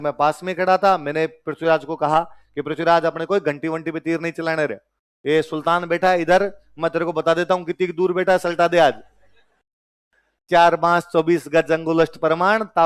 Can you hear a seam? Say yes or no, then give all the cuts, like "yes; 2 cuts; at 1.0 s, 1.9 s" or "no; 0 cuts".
no; 0 cuts